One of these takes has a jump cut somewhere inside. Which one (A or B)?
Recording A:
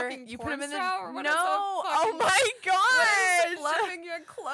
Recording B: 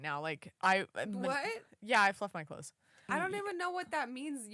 B